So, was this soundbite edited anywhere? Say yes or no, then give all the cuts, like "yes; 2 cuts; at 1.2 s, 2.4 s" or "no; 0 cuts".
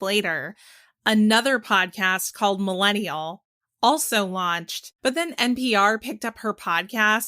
yes; 1 cut; at 4.9 s